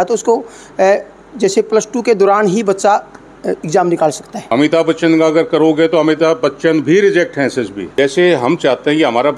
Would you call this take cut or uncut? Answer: cut